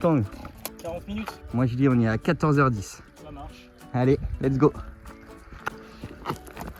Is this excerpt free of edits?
yes; 0 cuts

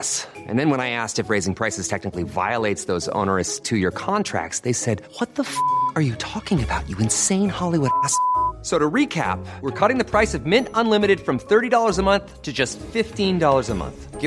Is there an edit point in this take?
no; 0 cuts

